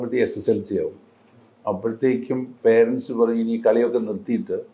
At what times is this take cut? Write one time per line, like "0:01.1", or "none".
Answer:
none